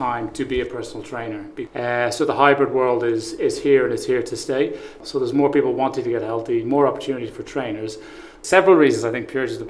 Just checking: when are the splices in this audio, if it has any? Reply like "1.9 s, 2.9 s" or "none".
1.5 s, 5.0 s, 8.4 s